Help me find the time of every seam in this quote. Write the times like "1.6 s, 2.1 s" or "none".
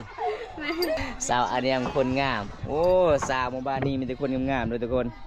1.0 s